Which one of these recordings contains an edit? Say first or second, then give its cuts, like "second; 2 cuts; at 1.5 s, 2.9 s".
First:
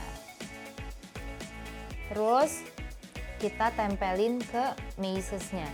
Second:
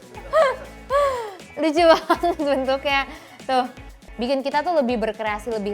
second; 1 cut; at 4.0 s